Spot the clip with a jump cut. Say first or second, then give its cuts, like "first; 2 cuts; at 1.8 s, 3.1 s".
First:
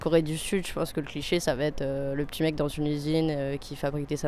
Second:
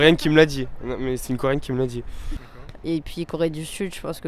second; 1 cut; at 2.2 s